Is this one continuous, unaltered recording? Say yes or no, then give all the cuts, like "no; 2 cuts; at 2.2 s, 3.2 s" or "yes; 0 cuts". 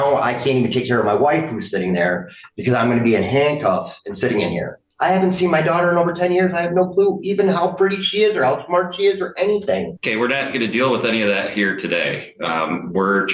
no; 1 cut; at 4.9 s